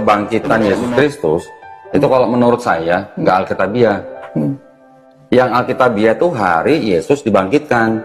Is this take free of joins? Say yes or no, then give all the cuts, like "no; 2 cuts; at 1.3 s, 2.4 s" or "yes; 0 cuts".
yes; 0 cuts